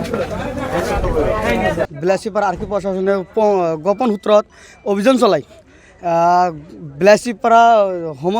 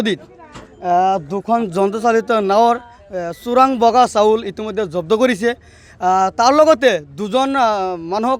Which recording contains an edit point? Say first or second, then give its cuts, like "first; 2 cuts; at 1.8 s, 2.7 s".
first; 1 cut; at 1.9 s